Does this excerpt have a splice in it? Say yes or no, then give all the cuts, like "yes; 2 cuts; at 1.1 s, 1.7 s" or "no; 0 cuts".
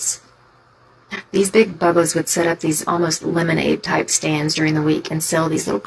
no; 0 cuts